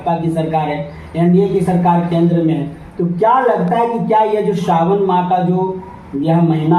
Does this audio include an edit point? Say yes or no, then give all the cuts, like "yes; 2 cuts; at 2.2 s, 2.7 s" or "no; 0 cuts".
no; 0 cuts